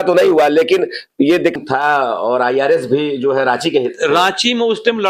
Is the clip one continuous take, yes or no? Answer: no